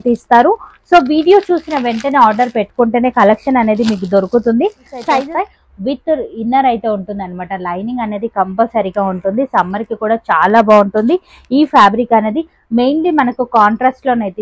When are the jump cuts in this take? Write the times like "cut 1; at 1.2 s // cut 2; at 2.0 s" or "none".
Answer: cut 1; at 5.2 s